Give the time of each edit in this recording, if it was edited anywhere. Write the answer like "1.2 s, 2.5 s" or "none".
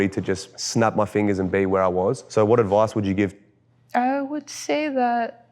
2.2 s, 3.4 s